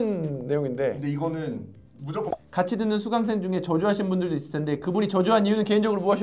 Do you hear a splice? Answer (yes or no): yes